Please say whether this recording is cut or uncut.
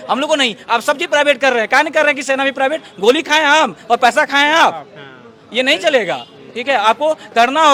uncut